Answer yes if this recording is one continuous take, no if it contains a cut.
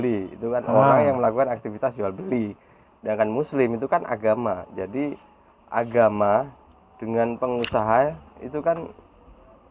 yes